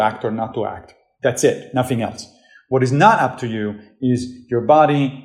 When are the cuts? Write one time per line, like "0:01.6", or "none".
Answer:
none